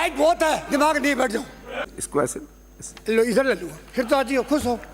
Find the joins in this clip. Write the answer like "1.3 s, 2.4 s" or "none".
1.9 s